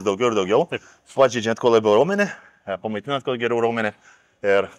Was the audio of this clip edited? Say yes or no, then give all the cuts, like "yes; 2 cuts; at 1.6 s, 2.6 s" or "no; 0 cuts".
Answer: no; 0 cuts